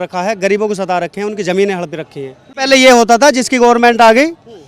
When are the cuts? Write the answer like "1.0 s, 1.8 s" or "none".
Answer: 2.6 s

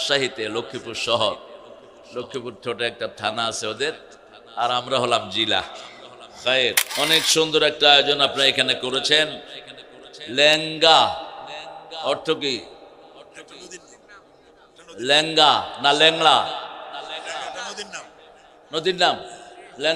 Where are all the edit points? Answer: 6.8 s

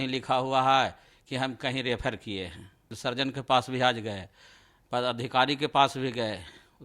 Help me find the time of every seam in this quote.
2.9 s

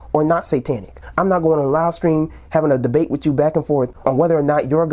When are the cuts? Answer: 1.0 s, 3.9 s

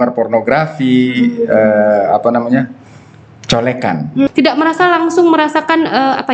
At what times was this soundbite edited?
4.3 s

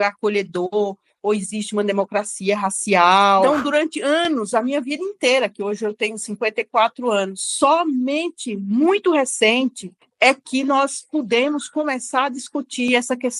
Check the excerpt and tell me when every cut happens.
3.4 s

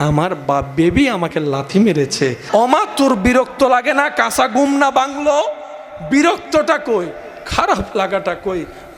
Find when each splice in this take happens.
2.4 s

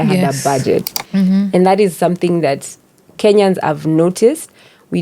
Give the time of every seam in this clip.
1.0 s

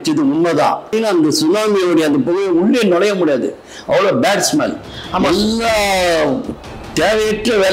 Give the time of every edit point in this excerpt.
0.9 s

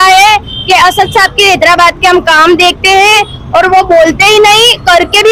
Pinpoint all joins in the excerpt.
none

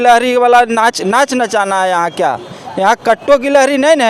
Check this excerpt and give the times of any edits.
none

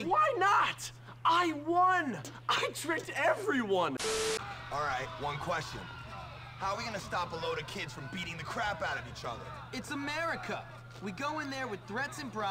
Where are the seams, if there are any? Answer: 4.2 s

